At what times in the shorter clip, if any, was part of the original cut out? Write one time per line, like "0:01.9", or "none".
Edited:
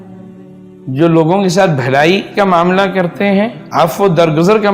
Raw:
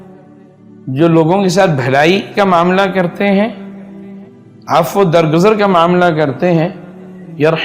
0:03.6